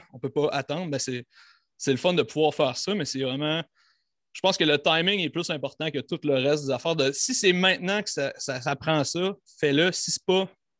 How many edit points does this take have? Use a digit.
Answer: 0